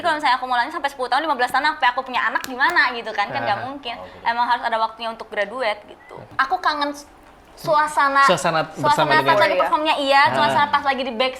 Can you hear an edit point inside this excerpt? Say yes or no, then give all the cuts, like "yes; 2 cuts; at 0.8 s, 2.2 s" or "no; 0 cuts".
yes; 1 cut; at 6.3 s